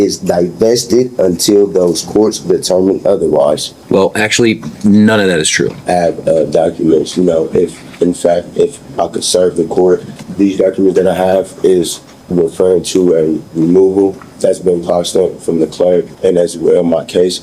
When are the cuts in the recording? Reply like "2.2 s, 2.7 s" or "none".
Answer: 3.7 s, 5.8 s, 10.2 s, 14.3 s, 16.1 s